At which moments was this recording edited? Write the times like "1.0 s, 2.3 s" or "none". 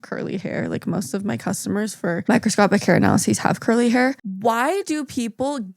4.2 s